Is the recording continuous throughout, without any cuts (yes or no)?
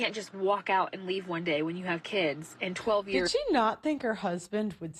yes